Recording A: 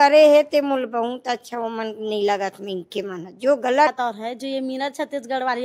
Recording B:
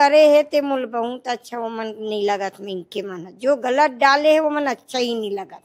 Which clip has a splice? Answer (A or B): A